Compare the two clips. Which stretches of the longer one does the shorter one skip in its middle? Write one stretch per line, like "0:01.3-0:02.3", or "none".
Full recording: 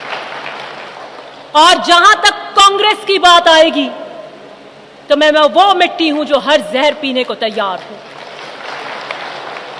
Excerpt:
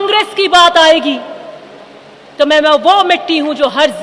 none